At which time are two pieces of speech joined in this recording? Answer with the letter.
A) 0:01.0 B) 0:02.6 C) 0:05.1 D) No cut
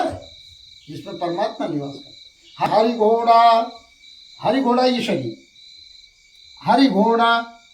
B